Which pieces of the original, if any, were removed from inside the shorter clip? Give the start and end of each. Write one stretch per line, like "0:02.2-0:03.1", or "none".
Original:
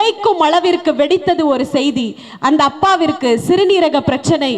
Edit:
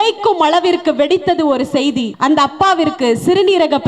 0:02.1-0:02.3